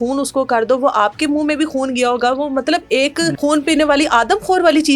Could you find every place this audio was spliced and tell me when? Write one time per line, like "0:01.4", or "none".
0:03.4